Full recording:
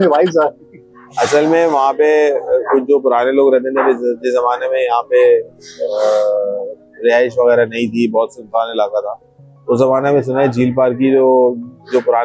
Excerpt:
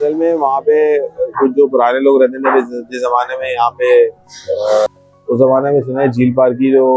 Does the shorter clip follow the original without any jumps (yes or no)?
no